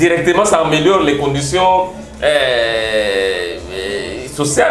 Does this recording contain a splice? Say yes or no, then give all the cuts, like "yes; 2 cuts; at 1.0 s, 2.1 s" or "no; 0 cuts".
no; 0 cuts